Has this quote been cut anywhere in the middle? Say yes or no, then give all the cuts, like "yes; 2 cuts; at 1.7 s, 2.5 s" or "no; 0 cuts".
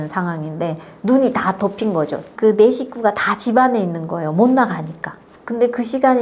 yes; 1 cut; at 2.3 s